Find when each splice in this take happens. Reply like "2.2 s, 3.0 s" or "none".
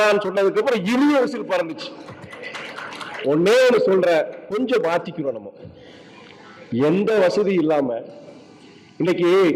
none

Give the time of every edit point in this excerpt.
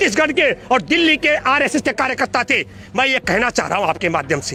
none

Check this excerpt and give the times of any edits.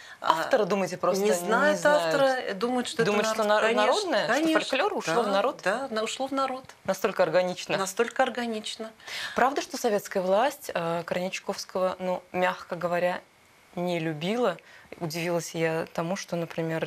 none

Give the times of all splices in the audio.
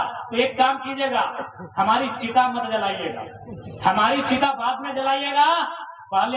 none

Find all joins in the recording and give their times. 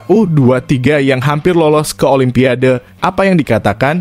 none

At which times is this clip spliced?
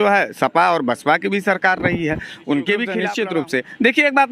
3.0 s

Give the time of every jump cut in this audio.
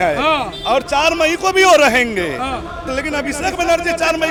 none

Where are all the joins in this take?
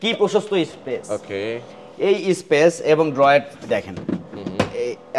none

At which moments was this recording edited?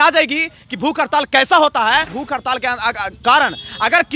2.1 s

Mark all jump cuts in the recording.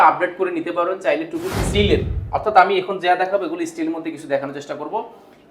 1.6 s

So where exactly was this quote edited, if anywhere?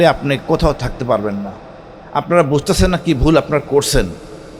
none

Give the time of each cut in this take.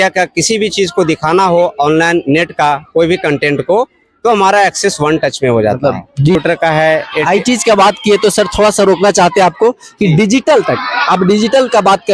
6.4 s

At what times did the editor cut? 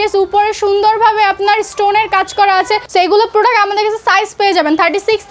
2.9 s

